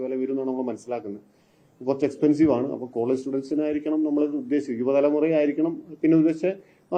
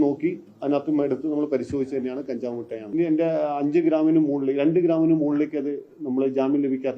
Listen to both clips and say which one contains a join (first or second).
second